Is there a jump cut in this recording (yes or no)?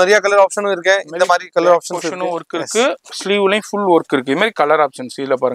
no